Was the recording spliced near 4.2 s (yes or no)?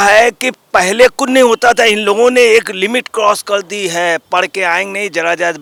no